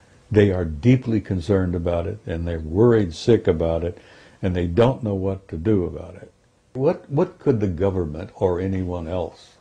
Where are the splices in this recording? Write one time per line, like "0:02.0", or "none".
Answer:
0:06.7